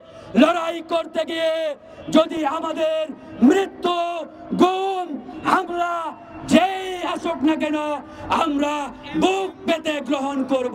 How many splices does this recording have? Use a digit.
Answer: 0